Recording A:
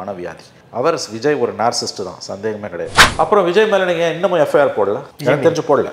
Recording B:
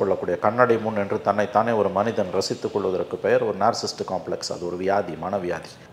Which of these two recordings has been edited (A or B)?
A